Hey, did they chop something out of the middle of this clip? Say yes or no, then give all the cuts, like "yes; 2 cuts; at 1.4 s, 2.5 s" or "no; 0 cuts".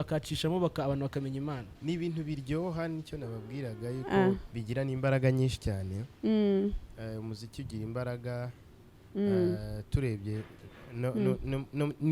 yes; 1 cut; at 1.7 s